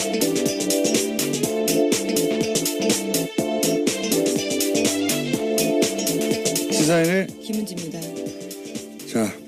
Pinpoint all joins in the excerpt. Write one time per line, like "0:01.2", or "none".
none